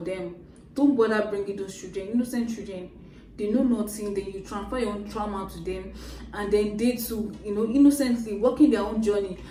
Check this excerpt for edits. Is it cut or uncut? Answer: uncut